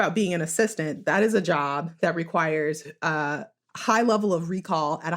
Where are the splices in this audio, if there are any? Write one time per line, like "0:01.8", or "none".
0:01.2